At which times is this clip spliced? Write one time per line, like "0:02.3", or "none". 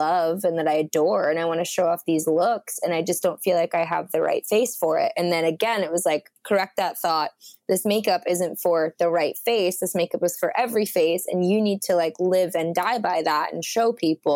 none